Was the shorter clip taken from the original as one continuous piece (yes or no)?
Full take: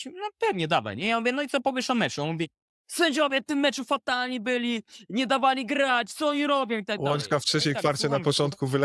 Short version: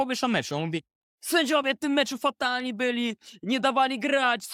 yes